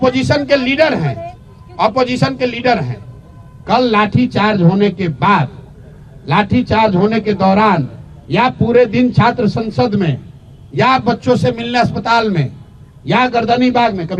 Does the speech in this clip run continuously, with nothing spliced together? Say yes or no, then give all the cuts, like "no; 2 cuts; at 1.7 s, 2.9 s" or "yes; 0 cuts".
yes; 0 cuts